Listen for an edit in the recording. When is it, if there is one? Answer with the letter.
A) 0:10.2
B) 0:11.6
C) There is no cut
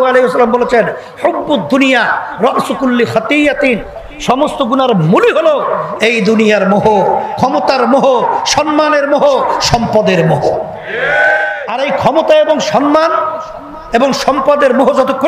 B